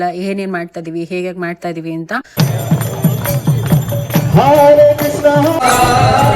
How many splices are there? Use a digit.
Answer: 1